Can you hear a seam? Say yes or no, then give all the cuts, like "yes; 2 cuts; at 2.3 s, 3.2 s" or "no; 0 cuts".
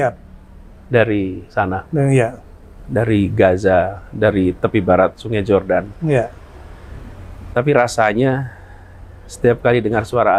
no; 0 cuts